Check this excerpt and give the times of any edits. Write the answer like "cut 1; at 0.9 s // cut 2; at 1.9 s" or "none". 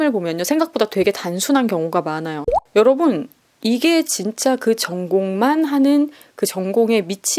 cut 1; at 2.5 s